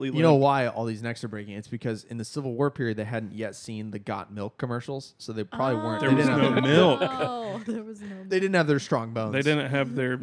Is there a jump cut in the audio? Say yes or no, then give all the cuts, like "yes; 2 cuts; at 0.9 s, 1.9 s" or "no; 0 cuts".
no; 0 cuts